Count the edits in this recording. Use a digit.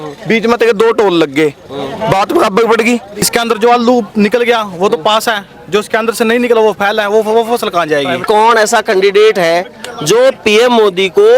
2